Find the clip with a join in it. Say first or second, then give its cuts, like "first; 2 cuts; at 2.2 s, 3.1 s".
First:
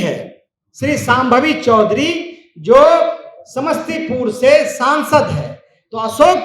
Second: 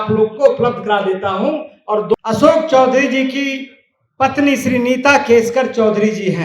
second; 1 cut; at 2.1 s